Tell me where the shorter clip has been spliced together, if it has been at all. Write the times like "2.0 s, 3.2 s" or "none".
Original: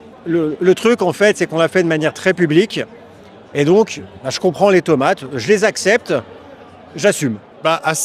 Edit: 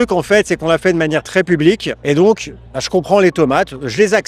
1.9 s